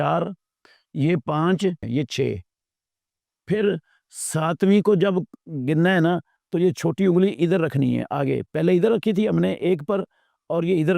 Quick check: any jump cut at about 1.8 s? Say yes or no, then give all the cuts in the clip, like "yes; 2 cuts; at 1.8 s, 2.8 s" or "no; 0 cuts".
yes; 1 cut; at 1.8 s